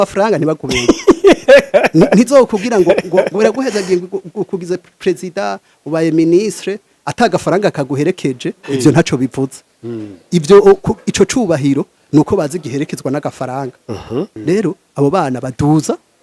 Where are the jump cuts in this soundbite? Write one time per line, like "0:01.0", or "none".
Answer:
0:14.3